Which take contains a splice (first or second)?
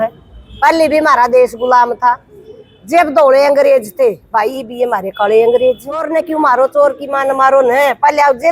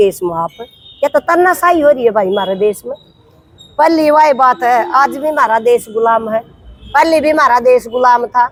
first